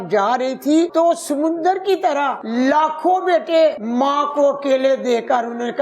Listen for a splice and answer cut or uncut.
cut